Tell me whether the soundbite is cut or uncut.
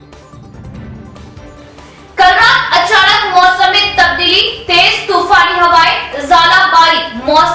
cut